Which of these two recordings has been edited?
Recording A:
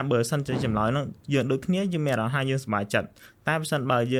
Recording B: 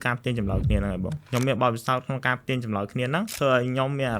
B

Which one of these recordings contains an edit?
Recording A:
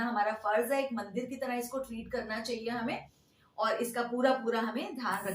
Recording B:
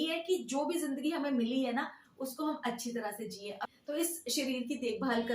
B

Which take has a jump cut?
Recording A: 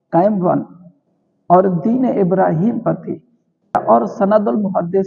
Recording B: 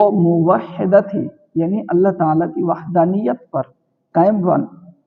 A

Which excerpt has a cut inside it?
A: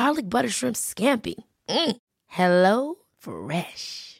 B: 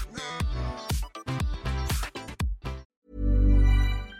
B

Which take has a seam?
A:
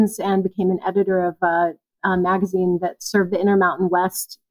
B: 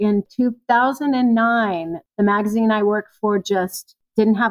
B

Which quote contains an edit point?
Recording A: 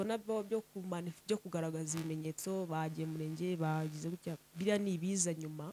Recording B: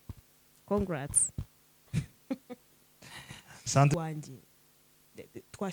B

